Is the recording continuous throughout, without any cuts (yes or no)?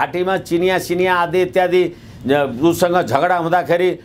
yes